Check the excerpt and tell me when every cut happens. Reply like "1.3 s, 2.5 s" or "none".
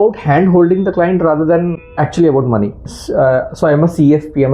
1.8 s, 2.9 s